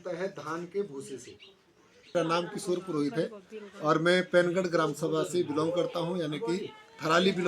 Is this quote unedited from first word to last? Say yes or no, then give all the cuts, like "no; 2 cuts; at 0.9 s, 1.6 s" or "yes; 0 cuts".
no; 1 cut; at 2.1 s